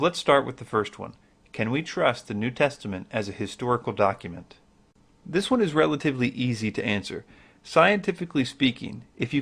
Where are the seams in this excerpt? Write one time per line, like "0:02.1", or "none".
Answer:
none